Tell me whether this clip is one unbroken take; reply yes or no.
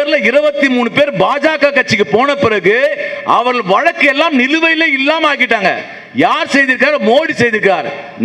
yes